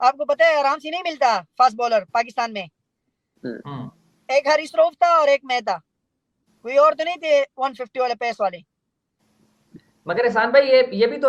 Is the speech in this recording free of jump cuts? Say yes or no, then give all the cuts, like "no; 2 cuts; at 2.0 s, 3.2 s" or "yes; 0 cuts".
yes; 0 cuts